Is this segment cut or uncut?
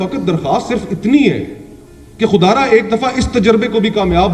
uncut